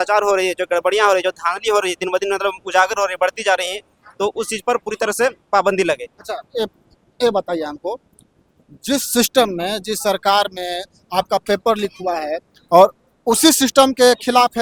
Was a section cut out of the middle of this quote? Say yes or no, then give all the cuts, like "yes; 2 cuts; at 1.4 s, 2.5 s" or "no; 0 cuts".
no; 0 cuts